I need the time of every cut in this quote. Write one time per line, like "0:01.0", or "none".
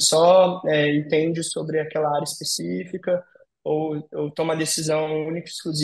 none